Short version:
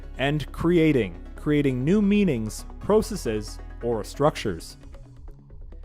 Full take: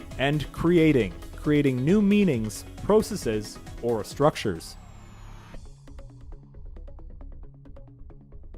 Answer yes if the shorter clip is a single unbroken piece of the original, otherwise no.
no